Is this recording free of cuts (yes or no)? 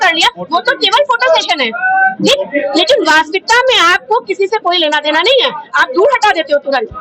yes